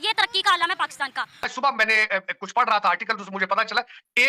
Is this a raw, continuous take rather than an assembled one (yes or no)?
no